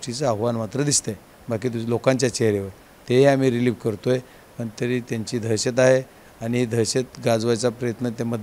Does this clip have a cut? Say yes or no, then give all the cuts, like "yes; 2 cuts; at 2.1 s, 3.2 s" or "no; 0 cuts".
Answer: no; 0 cuts